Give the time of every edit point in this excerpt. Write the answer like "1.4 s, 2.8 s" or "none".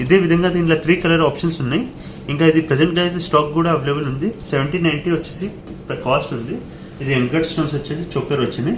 none